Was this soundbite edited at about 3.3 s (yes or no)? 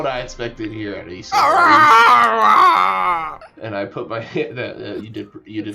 yes